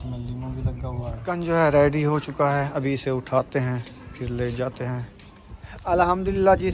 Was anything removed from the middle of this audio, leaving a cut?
no; 0 cuts

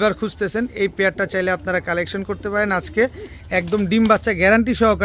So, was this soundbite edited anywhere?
no; 0 cuts

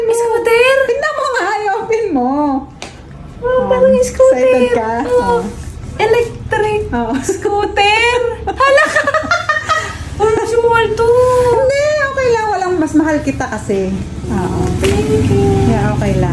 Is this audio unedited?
yes; 0 cuts

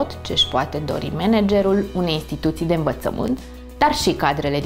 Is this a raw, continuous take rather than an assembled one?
yes; 0 cuts

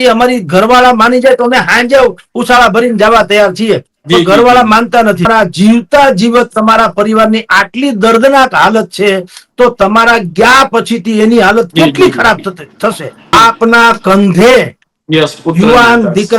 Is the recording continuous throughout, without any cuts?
no; 2 cuts; at 5.3 s, 13.3 s

